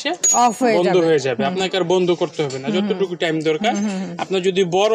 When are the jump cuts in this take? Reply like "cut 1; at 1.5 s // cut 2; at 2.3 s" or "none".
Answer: none